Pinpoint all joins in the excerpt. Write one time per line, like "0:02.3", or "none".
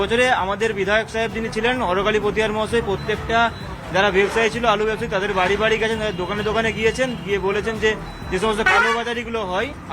none